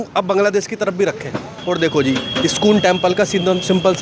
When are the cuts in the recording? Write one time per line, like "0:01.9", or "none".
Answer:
0:01.5